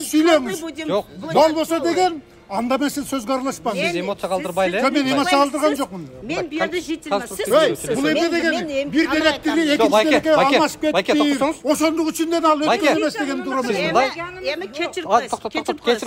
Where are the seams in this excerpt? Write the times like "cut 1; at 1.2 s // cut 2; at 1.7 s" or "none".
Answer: none

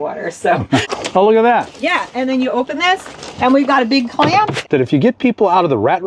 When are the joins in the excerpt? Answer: cut 1; at 0.9 s // cut 2; at 4.6 s

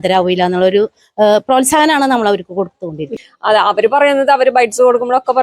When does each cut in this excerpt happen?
cut 1; at 3.0 s

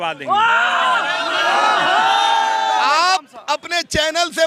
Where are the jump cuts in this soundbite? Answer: none

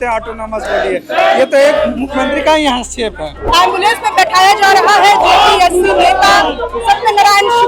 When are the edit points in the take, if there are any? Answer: cut 1; at 3.3 s

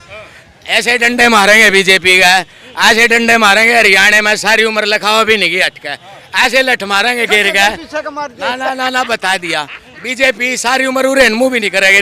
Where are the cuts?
none

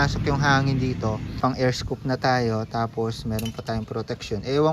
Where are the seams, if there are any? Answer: cut 1; at 1.4 s

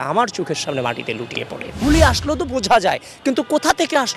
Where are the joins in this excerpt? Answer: cut 1; at 1.7 s

